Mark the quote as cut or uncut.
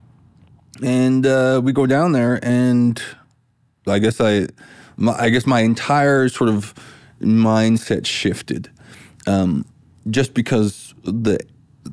uncut